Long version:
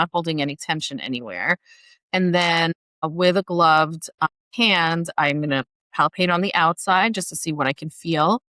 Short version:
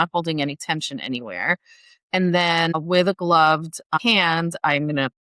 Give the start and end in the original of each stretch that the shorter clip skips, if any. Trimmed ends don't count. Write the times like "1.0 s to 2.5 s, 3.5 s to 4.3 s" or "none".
2.8 s to 3.1 s, 4.3 s to 4.5 s

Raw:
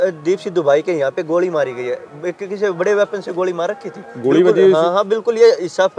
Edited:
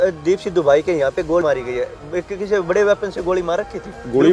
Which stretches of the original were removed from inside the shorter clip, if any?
1.4 s to 1.5 s

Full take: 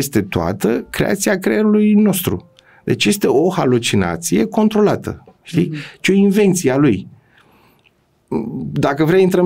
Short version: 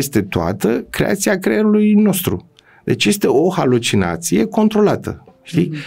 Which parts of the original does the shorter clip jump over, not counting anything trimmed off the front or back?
none

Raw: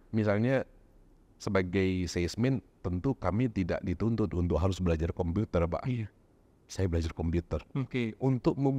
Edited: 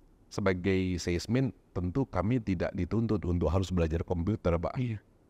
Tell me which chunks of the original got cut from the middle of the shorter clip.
none

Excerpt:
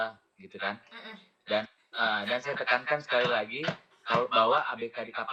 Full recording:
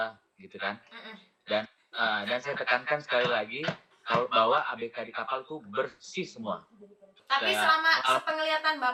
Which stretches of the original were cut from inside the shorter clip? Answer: none

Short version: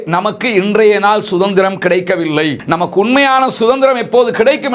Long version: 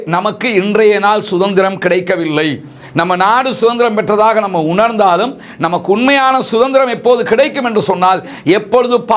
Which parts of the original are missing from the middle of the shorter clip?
2.6 s to 5.5 s

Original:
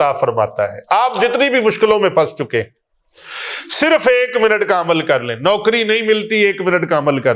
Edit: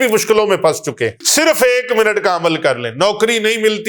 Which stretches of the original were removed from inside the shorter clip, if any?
2.7 s to 3.7 s

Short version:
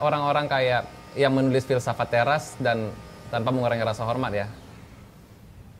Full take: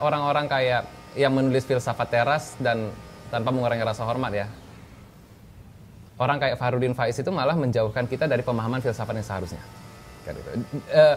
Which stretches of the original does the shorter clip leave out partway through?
none

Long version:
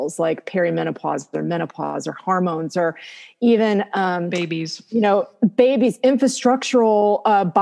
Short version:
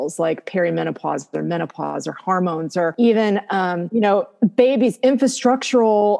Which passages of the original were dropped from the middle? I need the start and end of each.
2.9 s to 3.4 s, 4.2 s to 4.8 s

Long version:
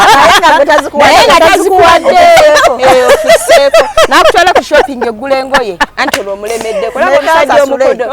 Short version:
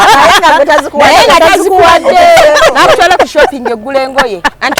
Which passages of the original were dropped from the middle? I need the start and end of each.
2.6 s to 3.9 s

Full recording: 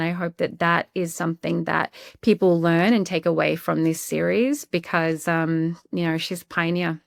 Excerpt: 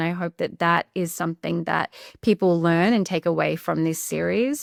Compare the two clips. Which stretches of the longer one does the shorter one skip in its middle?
none

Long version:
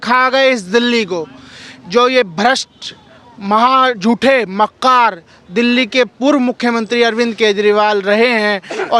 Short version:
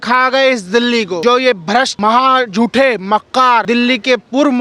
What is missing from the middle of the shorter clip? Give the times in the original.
1.2 s to 1.9 s, 2.6 s to 3.4 s, 5.1 s to 5.5 s

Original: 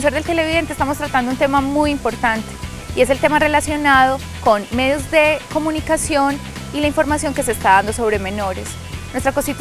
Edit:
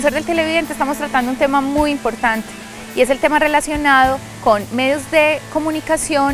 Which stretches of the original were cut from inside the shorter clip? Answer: none

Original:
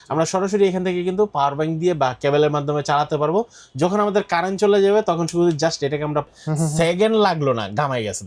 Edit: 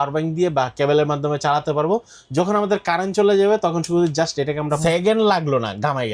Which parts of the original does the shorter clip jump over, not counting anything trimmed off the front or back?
6.2 s to 6.7 s

